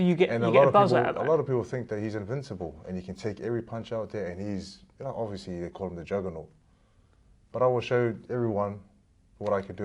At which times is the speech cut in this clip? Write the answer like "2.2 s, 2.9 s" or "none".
none